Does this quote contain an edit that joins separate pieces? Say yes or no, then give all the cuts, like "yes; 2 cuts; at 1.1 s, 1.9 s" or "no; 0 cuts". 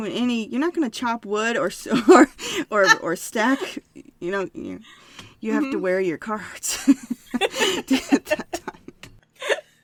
no; 0 cuts